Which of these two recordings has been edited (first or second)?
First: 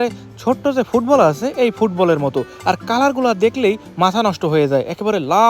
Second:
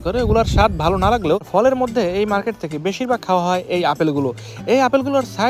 second